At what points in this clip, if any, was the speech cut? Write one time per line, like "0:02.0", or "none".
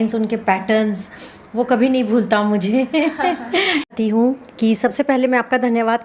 0:03.9